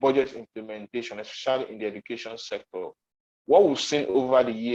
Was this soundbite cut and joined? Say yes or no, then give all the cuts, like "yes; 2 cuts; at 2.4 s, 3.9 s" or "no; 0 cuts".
no; 0 cuts